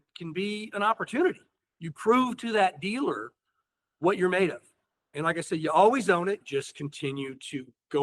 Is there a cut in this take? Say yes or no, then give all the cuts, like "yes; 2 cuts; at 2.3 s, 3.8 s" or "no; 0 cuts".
yes; 1 cut; at 6.4 s